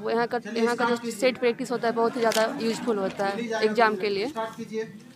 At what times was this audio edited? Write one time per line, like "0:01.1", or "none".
none